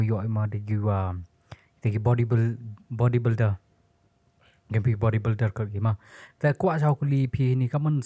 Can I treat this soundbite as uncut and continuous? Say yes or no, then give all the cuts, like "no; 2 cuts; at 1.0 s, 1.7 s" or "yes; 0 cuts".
yes; 0 cuts